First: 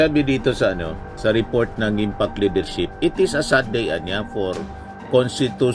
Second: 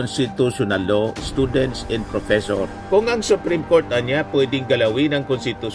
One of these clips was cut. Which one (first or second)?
second